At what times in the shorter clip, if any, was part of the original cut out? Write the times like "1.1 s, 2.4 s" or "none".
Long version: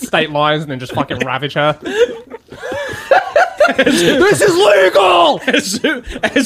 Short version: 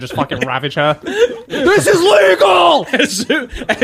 1.6 s